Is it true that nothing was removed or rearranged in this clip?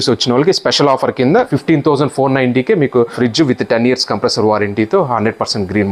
no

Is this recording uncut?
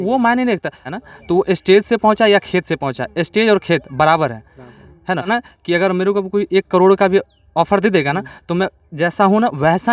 no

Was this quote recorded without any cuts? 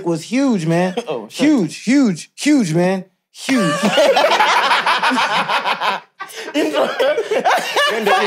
yes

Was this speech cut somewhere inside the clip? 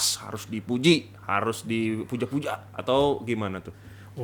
no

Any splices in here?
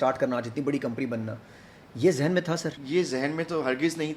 yes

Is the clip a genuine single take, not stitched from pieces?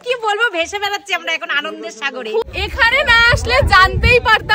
no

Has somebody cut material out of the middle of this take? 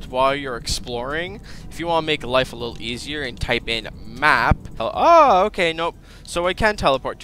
yes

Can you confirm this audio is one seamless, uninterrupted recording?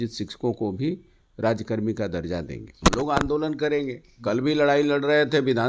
no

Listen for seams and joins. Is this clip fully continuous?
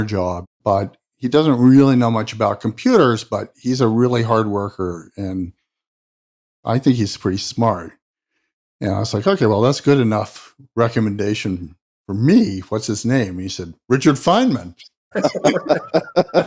yes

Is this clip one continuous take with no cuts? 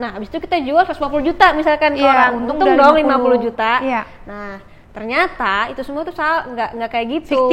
yes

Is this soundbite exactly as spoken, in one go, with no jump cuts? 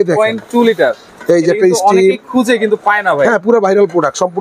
yes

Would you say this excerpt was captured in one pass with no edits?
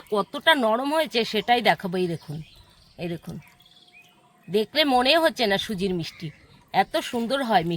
yes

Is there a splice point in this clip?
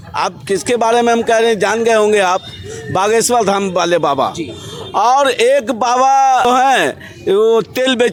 no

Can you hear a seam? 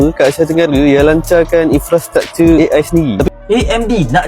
yes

